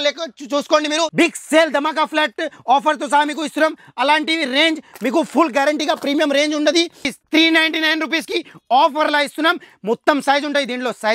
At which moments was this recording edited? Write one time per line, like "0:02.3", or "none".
0:01.1
0:07.1